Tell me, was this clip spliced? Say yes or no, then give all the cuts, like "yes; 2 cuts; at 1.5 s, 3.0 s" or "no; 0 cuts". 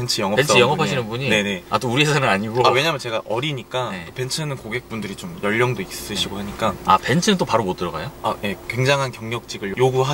no; 0 cuts